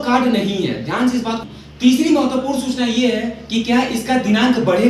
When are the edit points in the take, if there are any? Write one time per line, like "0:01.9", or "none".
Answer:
0:01.4